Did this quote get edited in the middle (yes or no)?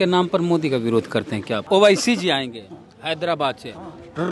yes